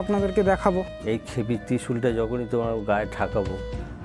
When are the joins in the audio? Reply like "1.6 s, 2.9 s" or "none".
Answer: 0.9 s